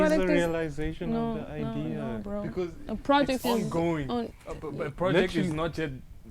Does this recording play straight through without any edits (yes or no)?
yes